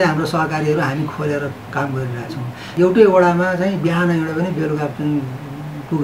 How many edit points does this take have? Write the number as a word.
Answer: one